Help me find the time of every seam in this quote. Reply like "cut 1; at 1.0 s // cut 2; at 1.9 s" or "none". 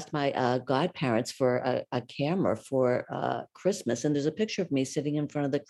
none